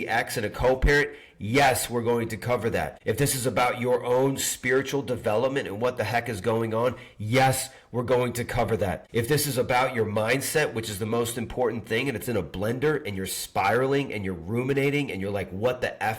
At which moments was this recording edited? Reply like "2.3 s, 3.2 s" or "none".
2.9 s, 9.0 s